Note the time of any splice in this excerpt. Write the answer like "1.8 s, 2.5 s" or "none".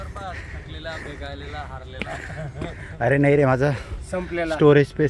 none